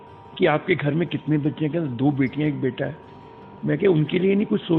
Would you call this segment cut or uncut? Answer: uncut